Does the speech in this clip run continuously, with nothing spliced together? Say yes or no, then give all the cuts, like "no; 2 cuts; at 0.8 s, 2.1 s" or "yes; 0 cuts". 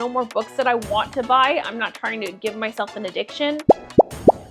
yes; 0 cuts